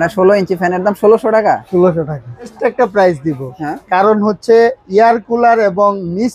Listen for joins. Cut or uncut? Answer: uncut